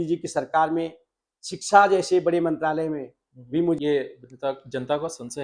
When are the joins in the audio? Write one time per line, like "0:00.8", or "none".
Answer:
0:03.8